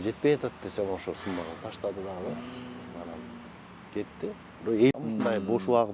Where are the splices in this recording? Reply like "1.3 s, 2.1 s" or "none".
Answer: 4.9 s